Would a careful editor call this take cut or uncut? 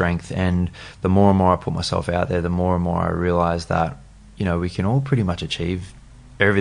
uncut